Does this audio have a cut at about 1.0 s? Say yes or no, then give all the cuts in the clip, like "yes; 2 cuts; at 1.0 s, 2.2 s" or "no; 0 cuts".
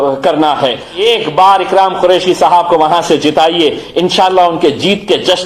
yes; 1 cut; at 1.0 s